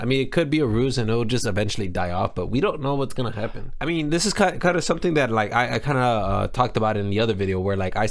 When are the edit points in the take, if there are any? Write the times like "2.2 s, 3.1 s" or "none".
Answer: 3.7 s